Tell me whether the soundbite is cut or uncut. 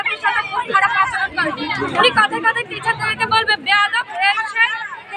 uncut